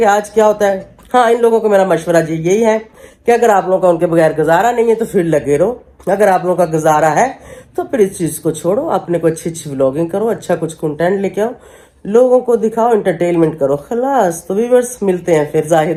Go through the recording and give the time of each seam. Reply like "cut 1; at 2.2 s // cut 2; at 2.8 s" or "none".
none